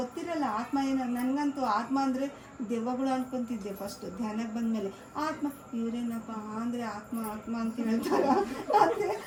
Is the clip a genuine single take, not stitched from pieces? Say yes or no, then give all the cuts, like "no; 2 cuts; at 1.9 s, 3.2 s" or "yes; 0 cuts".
yes; 0 cuts